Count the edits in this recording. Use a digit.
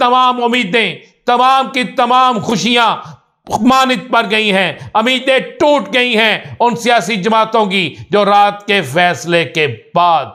0